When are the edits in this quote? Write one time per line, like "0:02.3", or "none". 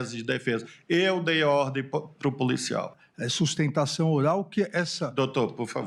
0:03.0